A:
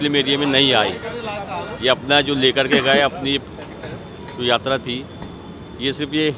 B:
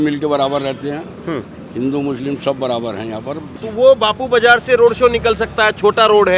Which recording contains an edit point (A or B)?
B